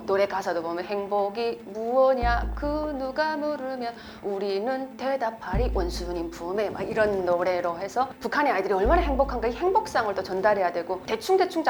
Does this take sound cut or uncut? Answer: uncut